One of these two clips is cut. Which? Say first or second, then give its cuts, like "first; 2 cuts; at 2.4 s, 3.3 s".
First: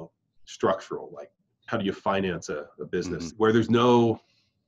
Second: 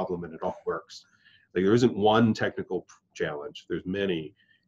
first; 2 cuts; at 1.6 s, 3.3 s